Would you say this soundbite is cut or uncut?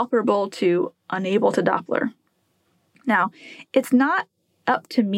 cut